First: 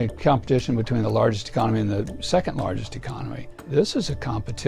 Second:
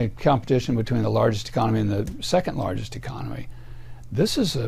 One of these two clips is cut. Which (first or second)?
first